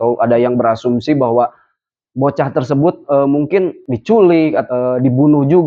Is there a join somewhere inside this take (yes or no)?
yes